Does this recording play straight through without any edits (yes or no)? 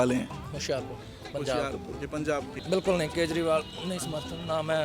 no